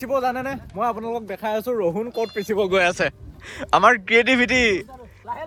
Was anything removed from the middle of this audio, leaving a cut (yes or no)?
no